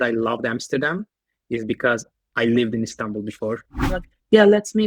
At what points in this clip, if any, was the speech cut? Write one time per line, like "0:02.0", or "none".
0:03.8